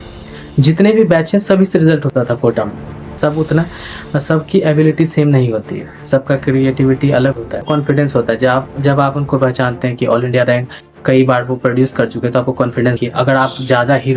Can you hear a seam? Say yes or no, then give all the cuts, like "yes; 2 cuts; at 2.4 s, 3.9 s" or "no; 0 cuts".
yes; 3 cuts; at 3.2 s, 7.6 s, 13.0 s